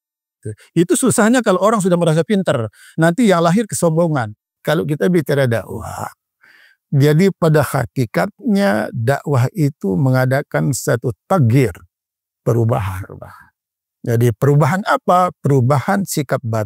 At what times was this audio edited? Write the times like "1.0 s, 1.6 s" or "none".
4.5 s